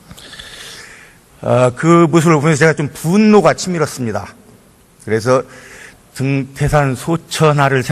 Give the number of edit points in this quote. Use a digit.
1